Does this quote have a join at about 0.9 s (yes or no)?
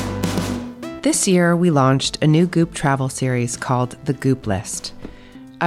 yes